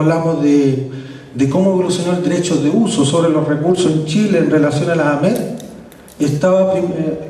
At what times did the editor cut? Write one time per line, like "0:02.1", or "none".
0:02.7

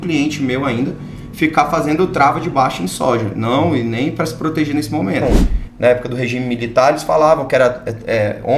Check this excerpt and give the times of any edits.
0:05.2

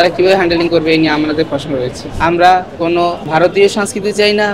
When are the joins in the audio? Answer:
0:02.0
0:02.8

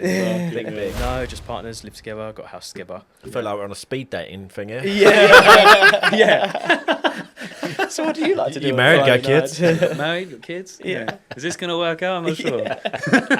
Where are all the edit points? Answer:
0:01.0

